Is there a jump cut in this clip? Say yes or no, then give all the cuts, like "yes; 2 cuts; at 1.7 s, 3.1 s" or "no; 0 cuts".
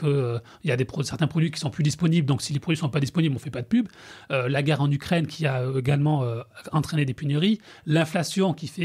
no; 0 cuts